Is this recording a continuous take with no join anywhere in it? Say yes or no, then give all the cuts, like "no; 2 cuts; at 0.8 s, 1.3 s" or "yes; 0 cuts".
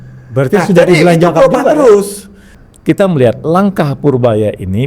no; 1 cut; at 2.4 s